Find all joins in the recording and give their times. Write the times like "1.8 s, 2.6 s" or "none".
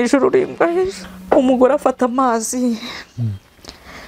1.1 s